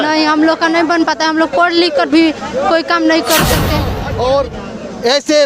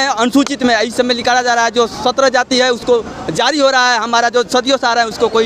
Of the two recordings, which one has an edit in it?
first; 1 cut; at 3.9 s

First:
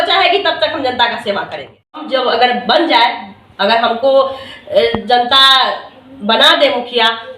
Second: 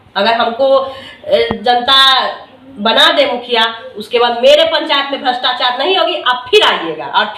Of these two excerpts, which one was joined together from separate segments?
first; 1 cut; at 2.0 s

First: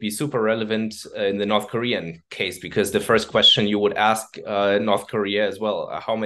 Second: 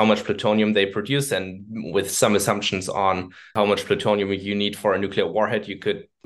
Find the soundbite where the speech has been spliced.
second; 1 cut; at 3.5 s

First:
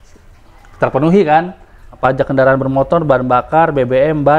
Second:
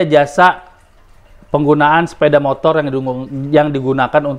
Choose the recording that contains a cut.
first; 1 cut; at 2.0 s

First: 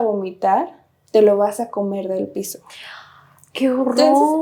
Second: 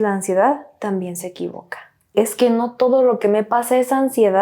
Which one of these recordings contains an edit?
second; 1 cut; at 2.1 s

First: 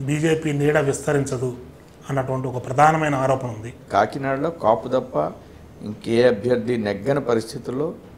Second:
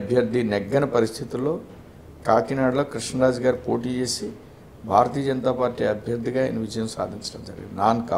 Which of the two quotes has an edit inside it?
first; 1 cut; at 3.7 s

